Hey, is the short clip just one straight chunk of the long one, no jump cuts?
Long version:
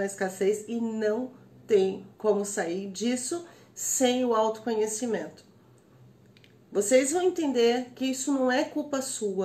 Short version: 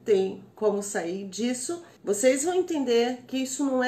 no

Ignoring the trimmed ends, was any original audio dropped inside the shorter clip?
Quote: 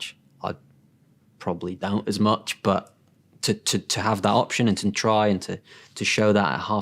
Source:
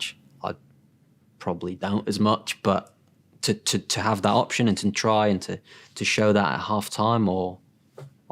no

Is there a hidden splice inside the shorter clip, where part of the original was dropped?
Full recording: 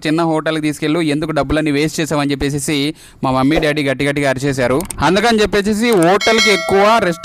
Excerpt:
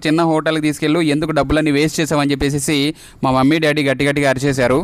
no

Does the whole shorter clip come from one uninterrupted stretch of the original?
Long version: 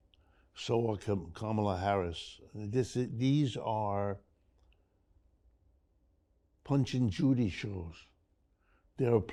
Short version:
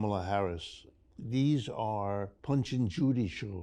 no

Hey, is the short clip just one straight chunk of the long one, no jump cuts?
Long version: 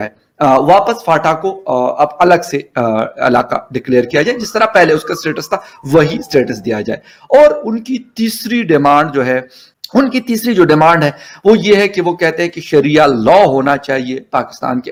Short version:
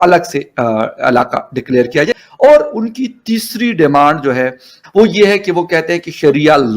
no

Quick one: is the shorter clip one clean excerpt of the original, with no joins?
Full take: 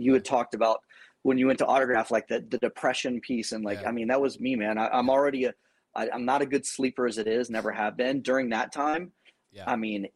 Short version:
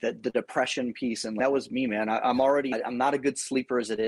no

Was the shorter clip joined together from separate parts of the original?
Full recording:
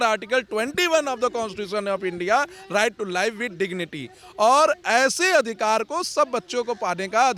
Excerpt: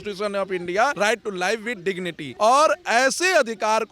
yes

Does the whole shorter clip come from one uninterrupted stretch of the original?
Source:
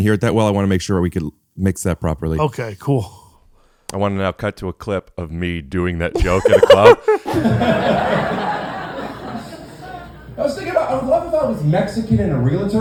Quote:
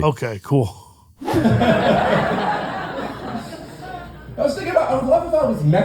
no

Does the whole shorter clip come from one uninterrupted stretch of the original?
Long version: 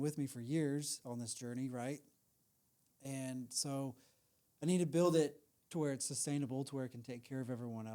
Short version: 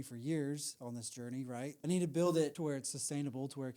no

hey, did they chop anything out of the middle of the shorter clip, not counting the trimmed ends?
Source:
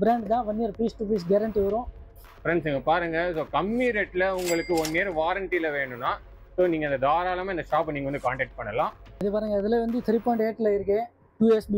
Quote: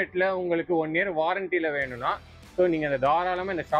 no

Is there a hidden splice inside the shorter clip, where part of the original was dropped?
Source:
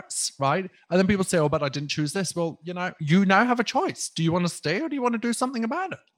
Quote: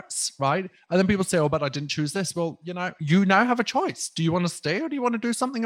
no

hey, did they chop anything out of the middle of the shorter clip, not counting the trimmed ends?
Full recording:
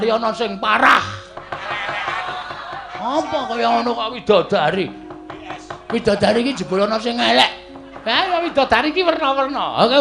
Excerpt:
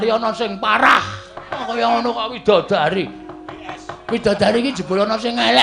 yes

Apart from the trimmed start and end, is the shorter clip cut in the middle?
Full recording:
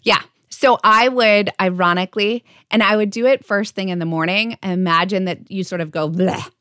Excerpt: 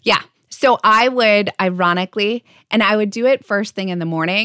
no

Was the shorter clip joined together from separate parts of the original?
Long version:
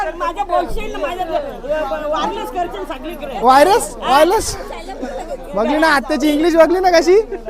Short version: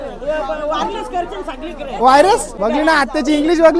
yes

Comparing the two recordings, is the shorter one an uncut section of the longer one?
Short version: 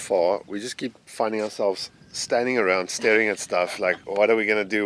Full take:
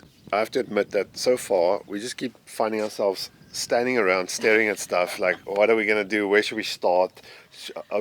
yes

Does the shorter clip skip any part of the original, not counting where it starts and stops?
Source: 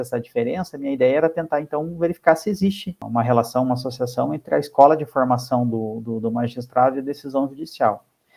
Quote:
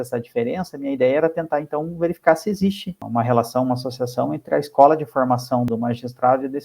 yes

